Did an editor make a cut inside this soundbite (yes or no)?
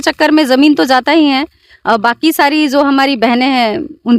no